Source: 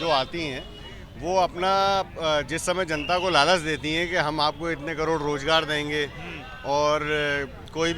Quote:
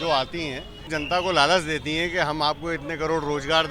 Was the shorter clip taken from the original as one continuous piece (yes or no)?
no